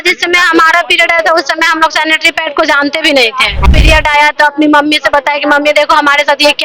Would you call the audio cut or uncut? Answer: cut